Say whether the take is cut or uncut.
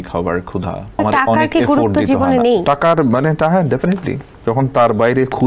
cut